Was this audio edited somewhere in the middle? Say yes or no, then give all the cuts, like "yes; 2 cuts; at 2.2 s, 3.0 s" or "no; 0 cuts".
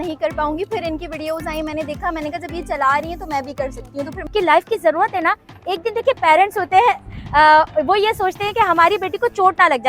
yes; 1 cut; at 4.3 s